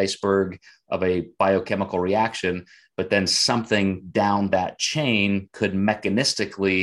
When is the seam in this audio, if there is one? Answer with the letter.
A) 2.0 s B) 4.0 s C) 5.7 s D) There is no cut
D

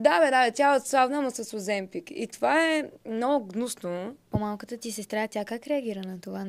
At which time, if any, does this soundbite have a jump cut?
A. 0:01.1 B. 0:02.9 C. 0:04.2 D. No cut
C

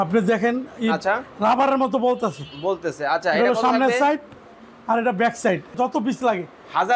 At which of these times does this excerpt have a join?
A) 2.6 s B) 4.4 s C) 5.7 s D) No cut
C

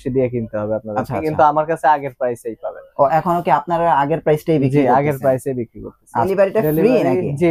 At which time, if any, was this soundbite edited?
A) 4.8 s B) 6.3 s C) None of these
B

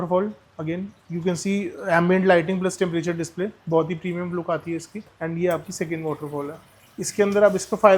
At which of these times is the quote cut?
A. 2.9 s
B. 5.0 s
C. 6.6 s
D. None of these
B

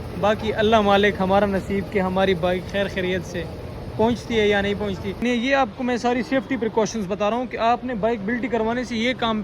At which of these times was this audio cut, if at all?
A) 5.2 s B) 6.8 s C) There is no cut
A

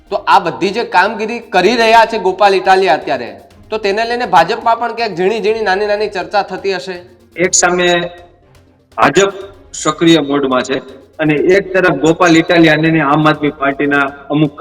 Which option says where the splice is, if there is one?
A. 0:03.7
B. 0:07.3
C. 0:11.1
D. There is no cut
B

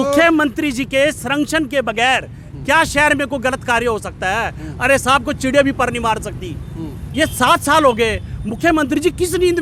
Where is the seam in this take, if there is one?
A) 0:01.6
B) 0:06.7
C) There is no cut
C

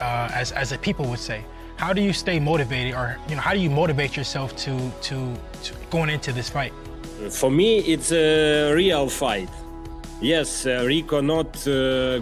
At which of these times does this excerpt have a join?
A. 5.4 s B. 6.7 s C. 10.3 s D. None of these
D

